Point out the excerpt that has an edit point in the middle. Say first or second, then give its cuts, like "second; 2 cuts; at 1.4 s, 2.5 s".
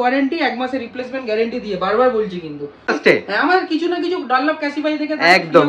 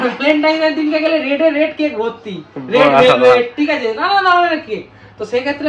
first; 1 cut; at 3.0 s